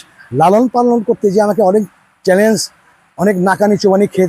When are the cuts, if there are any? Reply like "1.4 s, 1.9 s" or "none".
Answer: none